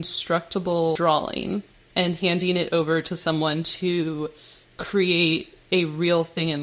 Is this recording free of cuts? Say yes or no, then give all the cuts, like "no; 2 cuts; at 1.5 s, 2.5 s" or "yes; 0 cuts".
no; 2 cuts; at 1.0 s, 1.8 s